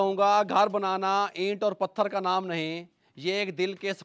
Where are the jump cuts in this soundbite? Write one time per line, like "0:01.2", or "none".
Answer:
none